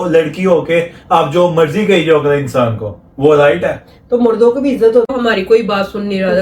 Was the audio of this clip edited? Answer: yes; 1 cut; at 5.1 s

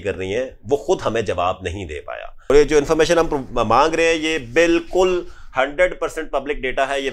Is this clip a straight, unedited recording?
no; 1 cut; at 2.5 s

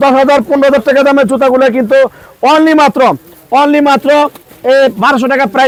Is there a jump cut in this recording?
no; 0 cuts

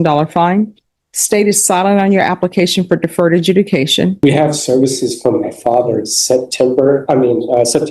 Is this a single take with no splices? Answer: no; 1 cut; at 4.2 s

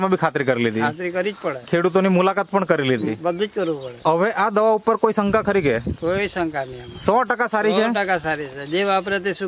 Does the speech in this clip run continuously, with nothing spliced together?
yes; 0 cuts

